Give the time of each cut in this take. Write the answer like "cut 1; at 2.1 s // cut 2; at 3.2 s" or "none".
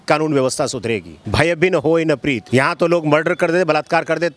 cut 1; at 1.2 s // cut 2; at 2.4 s

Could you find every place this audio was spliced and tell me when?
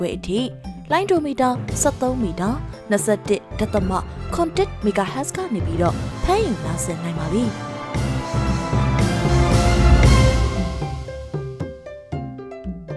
cut 1; at 7.7 s

